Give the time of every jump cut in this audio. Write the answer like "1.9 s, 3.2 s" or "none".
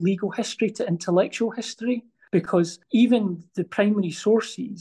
2.6 s, 3.5 s